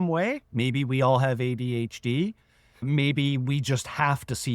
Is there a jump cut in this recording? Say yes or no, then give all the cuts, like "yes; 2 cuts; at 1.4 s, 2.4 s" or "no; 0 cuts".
yes; 1 cut; at 2.7 s